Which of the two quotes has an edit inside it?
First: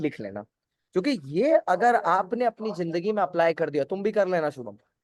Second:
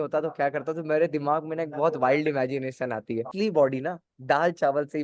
second; 1 cut; at 3.3 s

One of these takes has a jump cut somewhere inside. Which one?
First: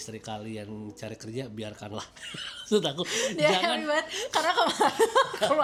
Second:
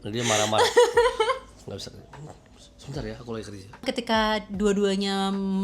second; 1 cut; at 3.8 s

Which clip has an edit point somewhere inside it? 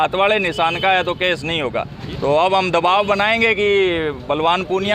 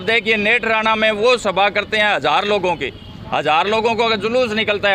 first; 1 cut; at 2.0 s

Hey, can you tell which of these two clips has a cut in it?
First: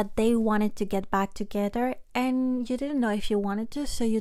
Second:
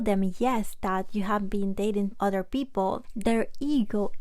second; 2 cuts; at 2.1 s, 3.1 s

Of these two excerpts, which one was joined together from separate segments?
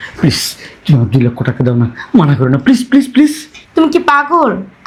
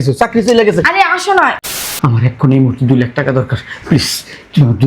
second; 1 cut; at 1.7 s

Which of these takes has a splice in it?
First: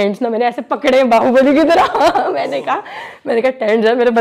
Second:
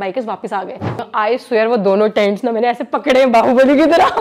second; 1 cut; at 1.0 s

